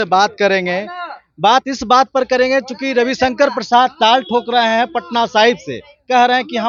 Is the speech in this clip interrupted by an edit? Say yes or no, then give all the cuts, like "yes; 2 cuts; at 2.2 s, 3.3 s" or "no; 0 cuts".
no; 0 cuts